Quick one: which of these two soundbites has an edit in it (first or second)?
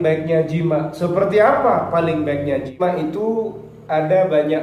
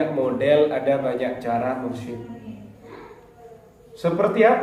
first